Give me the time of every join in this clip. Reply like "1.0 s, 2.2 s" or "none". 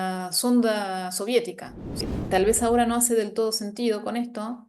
2.0 s